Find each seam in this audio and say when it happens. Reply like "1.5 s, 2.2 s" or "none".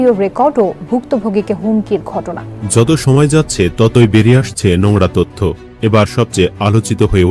2.8 s